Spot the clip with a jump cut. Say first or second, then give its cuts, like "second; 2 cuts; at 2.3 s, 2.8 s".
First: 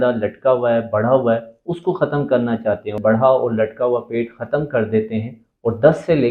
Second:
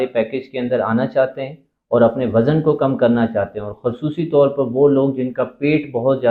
first; 1 cut; at 3.0 s